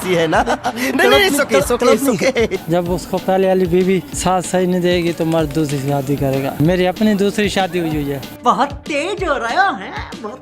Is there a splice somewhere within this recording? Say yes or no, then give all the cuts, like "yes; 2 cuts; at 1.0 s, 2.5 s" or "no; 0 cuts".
yes; 3 cuts; at 2.6 s, 4.1 s, 6.5 s